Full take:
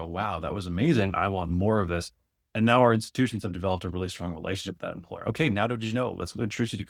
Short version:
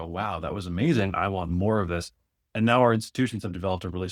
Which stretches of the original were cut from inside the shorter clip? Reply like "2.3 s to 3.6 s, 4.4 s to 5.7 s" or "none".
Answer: none